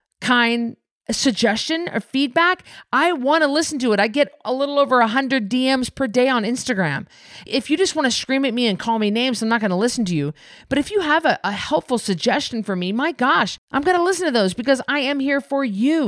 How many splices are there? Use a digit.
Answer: 1